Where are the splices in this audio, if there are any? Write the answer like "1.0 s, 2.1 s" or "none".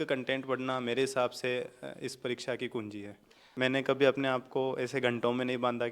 3.5 s